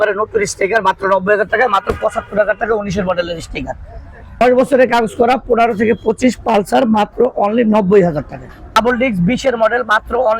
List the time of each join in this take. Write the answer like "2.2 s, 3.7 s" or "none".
4.4 s, 8.8 s

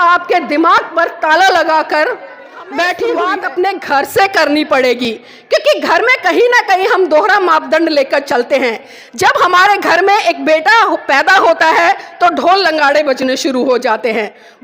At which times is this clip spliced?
3.3 s

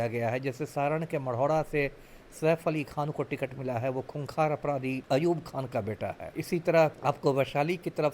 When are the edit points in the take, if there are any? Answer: 5.0 s, 6.3 s, 7.0 s

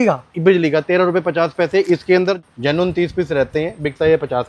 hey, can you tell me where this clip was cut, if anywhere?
2.4 s

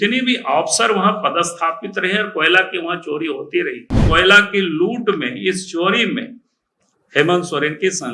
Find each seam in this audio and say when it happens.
4.0 s

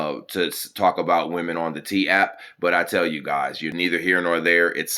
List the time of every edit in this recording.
3.6 s

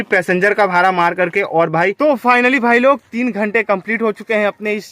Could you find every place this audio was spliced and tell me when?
1.9 s

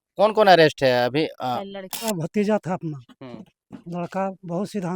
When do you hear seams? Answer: 2.0 s

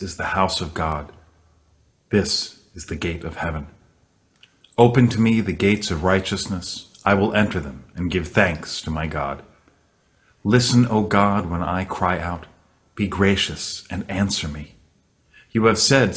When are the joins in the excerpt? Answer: none

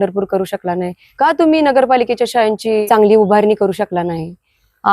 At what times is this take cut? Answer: 1.0 s, 2.8 s

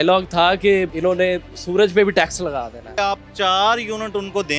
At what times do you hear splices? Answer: 0.9 s, 2.8 s

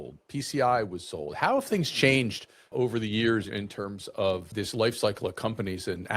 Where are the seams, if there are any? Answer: 2.7 s

